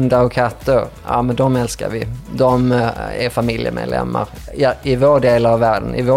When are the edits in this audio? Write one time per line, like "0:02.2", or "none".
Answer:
none